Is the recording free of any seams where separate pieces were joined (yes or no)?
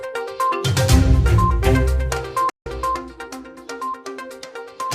no